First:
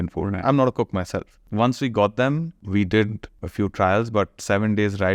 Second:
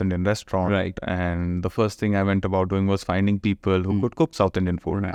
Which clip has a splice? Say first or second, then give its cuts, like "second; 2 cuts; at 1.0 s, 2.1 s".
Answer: first; 3 cuts; at 1.4 s, 2.6 s, 3.4 s